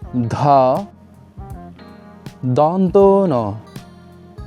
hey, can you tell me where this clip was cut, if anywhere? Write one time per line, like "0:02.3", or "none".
none